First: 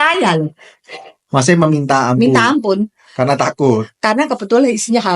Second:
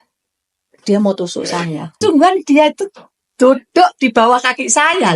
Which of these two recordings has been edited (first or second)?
second